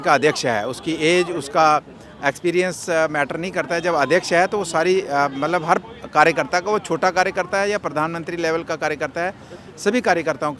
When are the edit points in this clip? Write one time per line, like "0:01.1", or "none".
none